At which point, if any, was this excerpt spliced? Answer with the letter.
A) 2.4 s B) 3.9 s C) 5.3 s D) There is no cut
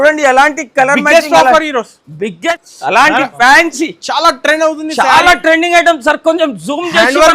A